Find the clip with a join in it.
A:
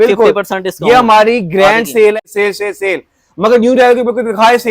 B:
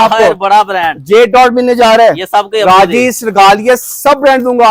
A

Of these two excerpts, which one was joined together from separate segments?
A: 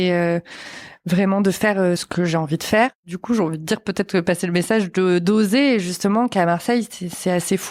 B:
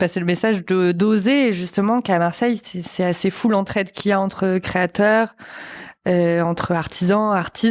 A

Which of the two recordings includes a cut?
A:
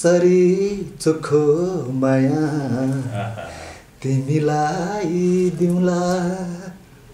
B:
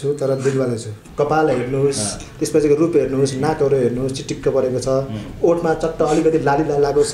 B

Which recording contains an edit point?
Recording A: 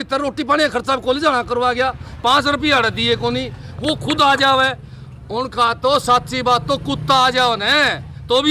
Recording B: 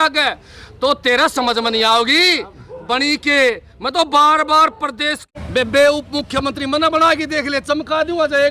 B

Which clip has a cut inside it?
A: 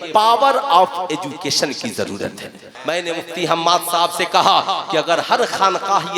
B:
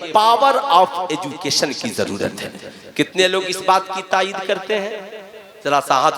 A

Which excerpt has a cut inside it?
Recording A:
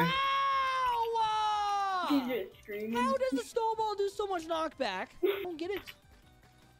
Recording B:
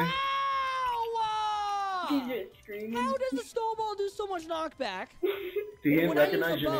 A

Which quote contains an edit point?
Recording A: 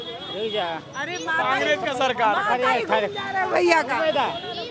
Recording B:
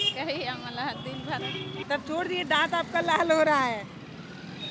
B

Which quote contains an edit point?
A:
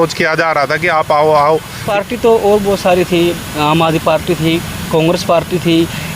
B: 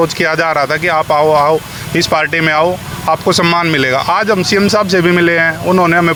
A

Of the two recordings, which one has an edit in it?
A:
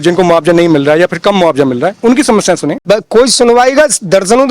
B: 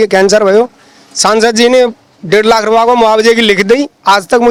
A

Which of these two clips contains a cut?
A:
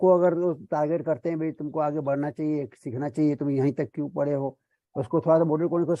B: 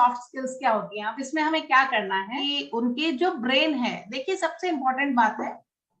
B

